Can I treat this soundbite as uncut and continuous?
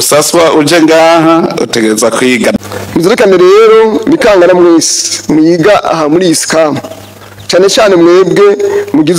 no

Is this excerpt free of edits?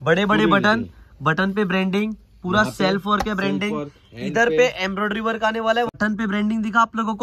no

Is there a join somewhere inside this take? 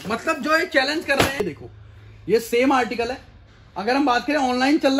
yes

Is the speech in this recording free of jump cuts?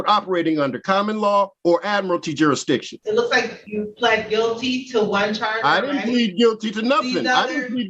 no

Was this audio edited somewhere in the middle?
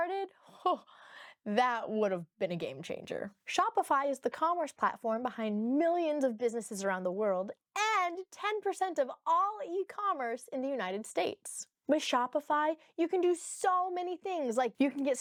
no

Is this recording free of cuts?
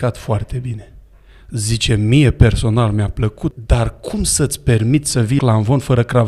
no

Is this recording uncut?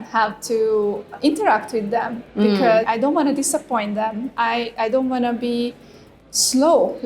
no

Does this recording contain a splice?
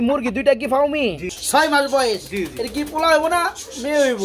yes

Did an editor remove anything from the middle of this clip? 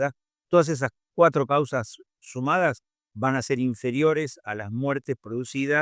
no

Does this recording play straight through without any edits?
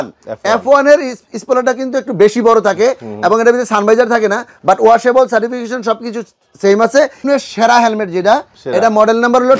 no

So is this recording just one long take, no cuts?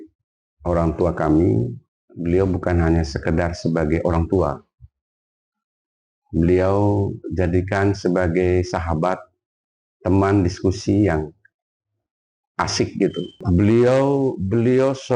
no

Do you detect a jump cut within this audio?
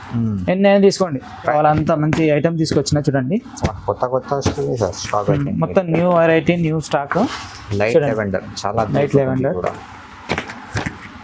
yes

